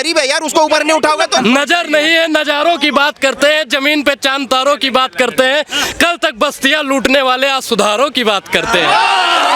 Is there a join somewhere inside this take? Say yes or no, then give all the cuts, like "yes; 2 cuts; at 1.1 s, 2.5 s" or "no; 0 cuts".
yes; 1 cut; at 1.4 s